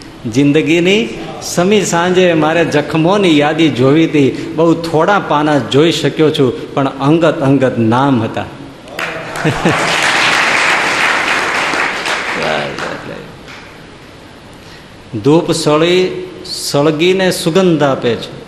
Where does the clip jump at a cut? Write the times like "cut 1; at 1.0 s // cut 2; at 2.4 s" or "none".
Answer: cut 1; at 14.5 s